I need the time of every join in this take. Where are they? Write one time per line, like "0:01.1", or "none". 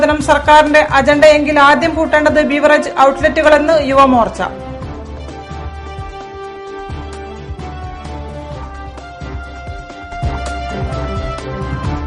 none